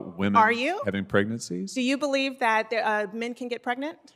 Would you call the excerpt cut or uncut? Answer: uncut